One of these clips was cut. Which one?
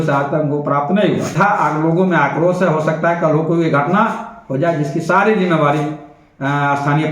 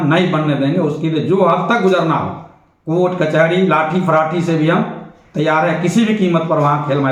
first; 1 cut; at 1.3 s

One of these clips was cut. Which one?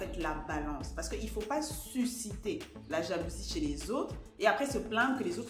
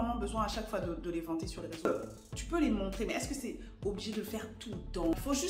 second; 1 cut; at 1.8 s

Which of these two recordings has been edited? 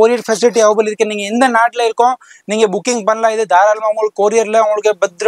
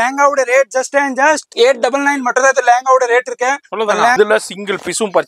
second; 2 cuts; at 1.5 s, 4.2 s

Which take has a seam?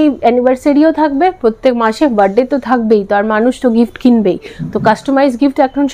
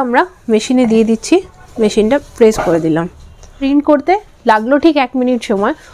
second; 2 cuts; at 1.6 s, 3.6 s

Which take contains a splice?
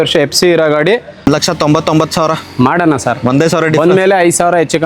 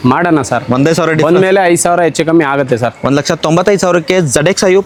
first; 1 cut; at 1.2 s

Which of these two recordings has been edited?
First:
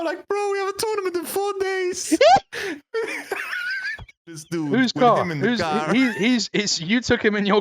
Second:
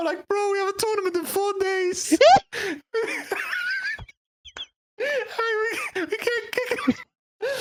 first; 1 cut; at 4.4 s

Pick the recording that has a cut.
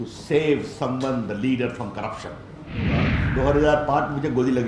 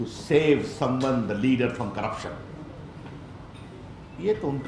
first; 1 cut; at 3.1 s

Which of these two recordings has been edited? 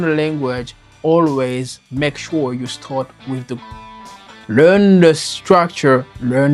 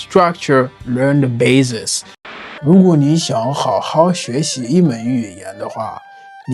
second; 1 cut; at 2.1 s

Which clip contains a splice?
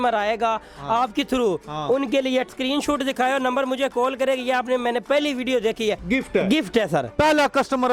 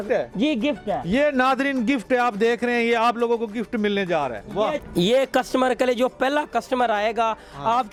first; 3 cuts; at 2.5 s, 6.0 s, 7.1 s

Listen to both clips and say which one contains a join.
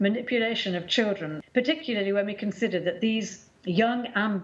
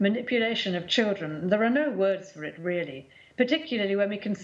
first; 1 cut; at 1.3 s

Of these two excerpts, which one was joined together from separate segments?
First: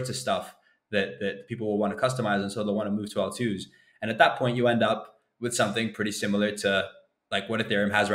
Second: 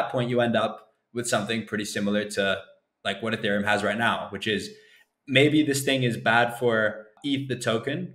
second; 1 cut; at 7.1 s

